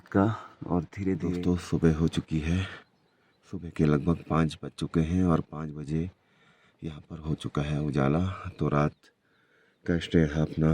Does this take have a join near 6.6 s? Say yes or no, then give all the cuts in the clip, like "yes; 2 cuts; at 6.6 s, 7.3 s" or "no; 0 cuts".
no; 1 cut; at 1.2 s